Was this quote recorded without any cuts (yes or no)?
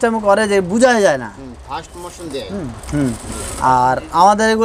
yes